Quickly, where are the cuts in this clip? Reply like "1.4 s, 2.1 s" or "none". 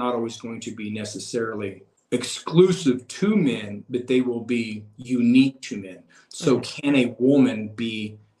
1.9 s